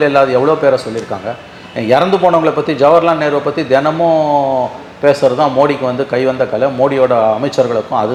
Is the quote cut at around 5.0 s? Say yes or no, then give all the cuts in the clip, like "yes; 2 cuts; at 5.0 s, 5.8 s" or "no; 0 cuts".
no; 0 cuts